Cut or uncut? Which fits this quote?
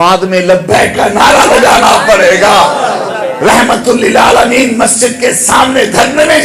uncut